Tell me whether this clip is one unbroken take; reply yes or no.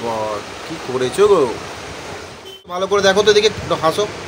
no